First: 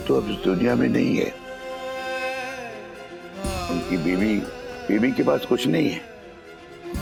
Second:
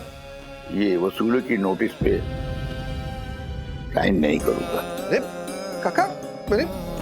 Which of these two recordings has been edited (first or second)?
second